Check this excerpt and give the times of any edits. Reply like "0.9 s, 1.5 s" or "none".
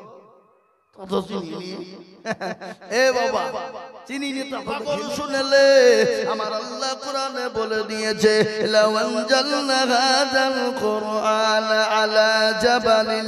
5.1 s